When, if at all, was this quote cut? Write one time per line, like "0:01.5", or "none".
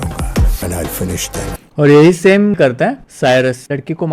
0:02.5